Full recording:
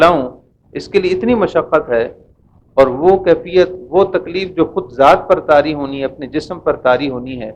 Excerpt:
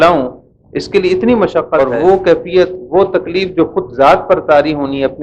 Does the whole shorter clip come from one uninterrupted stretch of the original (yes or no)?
no